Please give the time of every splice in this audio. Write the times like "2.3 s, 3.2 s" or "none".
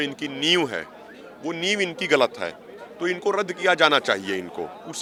none

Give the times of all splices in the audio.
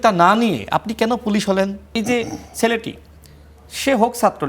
1.9 s

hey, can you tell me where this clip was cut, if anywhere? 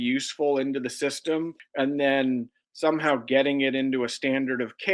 1.6 s

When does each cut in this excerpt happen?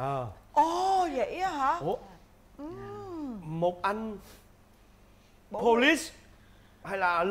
none

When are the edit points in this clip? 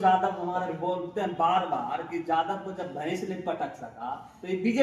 none

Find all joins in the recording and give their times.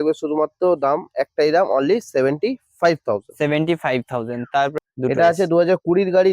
4.7 s

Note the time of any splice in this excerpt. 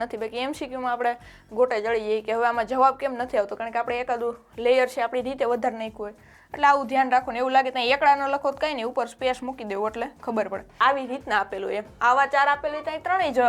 10.8 s

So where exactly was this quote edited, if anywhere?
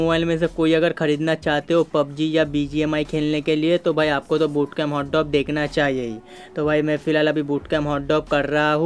none

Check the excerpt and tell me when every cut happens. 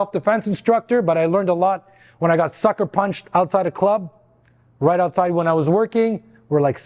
none

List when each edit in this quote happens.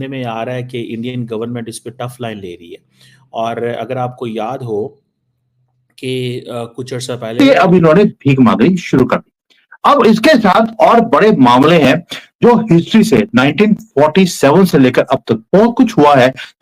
7.4 s

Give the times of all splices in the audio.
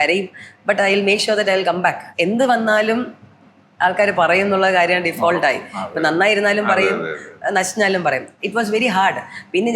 2.1 s, 8.4 s

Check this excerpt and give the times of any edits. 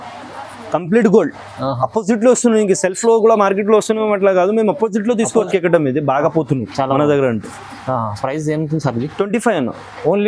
5.5 s

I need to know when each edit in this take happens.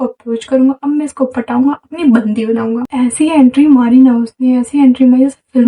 2.9 s

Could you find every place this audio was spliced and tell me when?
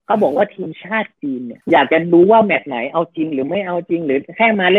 none

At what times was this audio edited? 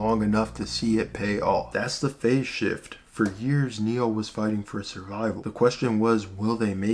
1.7 s

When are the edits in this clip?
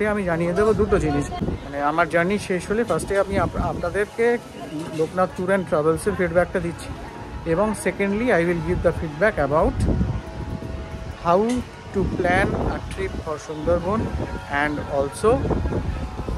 1.4 s

